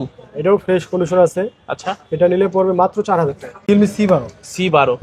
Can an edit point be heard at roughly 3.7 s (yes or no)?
yes